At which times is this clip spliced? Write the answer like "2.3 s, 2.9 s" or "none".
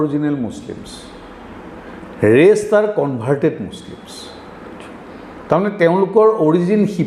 none